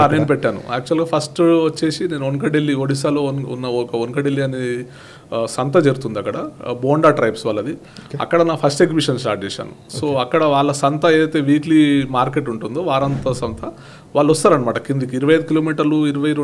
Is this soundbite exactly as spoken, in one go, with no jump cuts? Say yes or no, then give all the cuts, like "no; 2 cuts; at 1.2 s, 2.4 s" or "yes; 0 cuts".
yes; 0 cuts